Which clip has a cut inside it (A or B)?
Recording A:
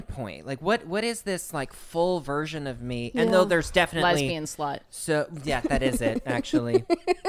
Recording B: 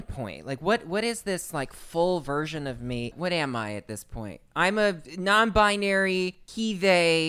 B